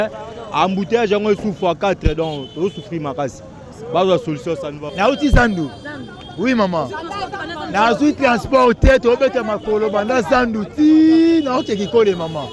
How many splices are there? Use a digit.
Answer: 1